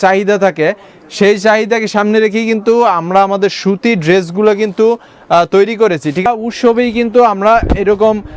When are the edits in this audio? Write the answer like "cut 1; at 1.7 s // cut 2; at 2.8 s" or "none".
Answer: cut 1; at 6.2 s